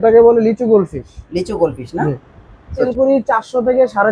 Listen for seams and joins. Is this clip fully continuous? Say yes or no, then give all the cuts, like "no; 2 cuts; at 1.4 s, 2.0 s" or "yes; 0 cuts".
no; 1 cut; at 2.8 s